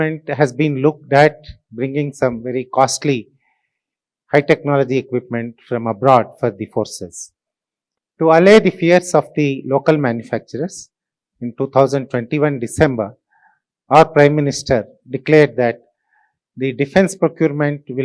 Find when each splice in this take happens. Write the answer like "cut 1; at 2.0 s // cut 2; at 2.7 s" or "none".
none